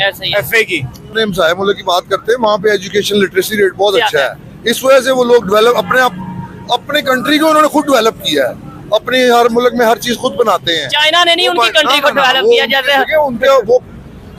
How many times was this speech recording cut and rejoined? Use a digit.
1